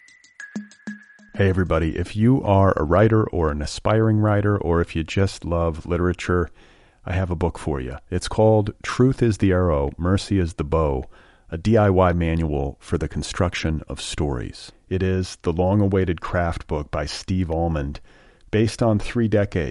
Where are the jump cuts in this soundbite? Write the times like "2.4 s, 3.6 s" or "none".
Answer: 0.9 s